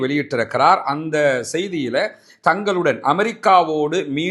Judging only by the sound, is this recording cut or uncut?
uncut